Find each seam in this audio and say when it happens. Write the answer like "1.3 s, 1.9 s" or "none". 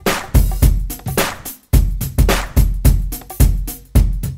none